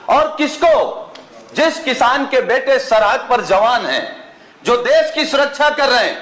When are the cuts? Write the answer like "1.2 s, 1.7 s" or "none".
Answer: none